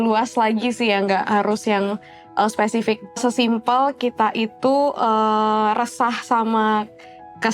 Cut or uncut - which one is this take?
cut